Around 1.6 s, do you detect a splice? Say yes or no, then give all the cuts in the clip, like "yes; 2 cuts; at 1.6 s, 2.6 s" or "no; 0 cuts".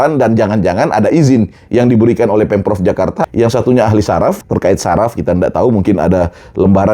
no; 2 cuts; at 3.2 s, 4.4 s